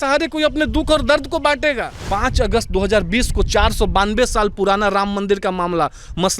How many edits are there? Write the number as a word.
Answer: one